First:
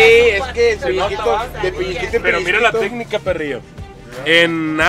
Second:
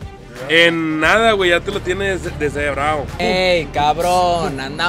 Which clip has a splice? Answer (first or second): second